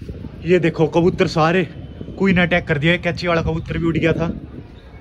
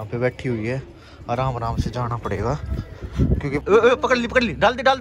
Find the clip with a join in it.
second; 1 cut; at 3.6 s

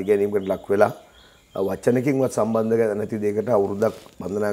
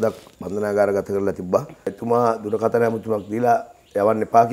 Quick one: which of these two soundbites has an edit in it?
second; 1 cut; at 2.0 s

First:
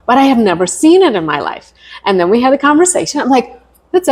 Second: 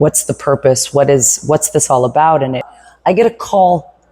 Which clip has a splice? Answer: second; 1 cut; at 2.6 s

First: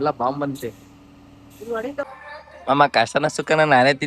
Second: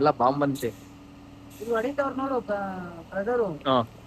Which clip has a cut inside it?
first; 1 cut; at 2.0 s

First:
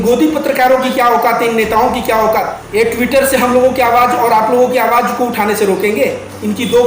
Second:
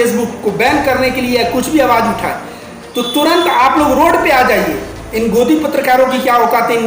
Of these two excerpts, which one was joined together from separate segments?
first; 1 cut; at 2.6 s

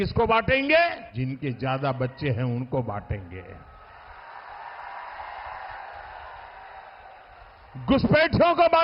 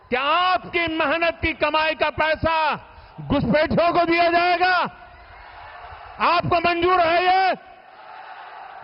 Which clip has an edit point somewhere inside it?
first; 1 cut; at 1.1 s

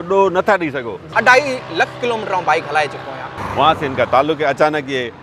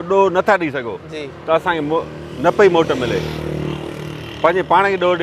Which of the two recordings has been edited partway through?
first; 2 cuts; at 1.0 s, 3.1 s

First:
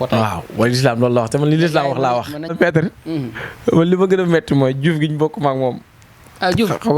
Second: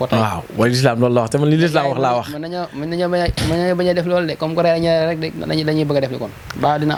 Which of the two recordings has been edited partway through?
first; 1 cut; at 2.5 s

